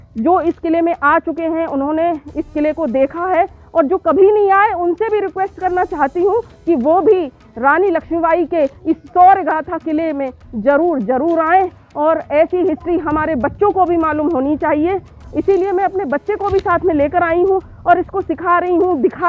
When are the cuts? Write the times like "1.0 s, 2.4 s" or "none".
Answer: none